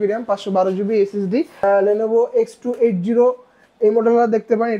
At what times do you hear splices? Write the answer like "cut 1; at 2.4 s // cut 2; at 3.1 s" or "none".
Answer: cut 1; at 1.5 s